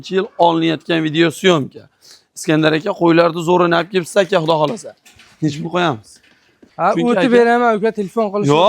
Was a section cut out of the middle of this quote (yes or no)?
yes